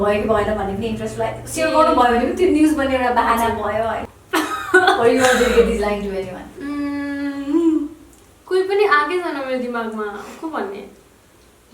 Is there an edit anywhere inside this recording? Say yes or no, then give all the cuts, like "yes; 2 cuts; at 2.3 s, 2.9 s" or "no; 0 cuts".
yes; 1 cut; at 4.1 s